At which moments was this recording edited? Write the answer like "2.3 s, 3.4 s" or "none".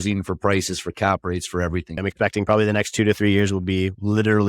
1.9 s